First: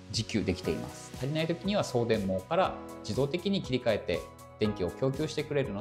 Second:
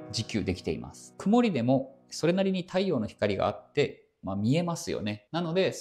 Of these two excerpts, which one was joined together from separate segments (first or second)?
first